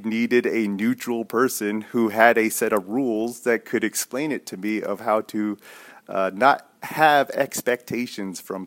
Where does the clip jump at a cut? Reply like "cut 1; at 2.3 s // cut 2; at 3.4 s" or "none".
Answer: none